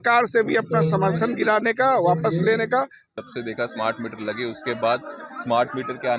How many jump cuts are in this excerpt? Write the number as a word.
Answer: one